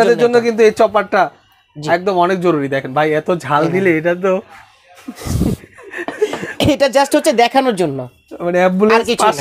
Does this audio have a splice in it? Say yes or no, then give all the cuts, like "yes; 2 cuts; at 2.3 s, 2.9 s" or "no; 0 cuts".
no; 0 cuts